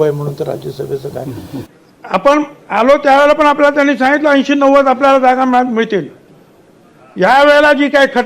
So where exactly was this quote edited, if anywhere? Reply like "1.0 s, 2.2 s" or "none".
1.7 s